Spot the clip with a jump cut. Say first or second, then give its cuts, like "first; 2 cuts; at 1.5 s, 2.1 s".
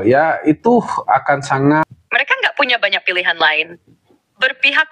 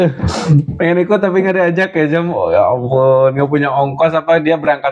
first; 1 cut; at 1.9 s